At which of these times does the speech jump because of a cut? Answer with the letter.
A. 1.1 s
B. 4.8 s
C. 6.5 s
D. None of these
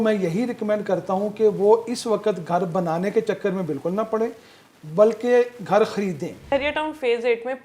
C